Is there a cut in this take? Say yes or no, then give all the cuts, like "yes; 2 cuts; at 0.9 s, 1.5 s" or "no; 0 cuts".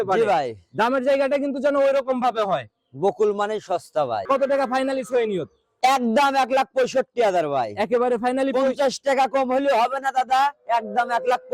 yes; 1 cut; at 4.2 s